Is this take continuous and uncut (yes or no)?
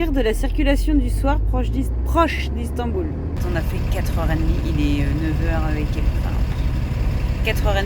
no